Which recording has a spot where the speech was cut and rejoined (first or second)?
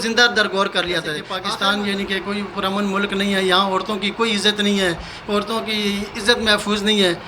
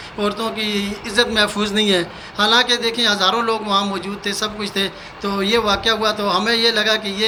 first